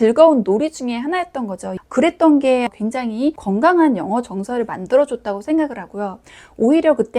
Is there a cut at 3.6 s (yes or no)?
no